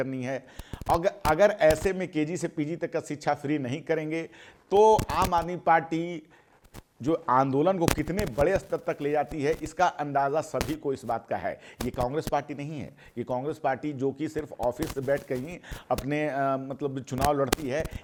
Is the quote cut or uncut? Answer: uncut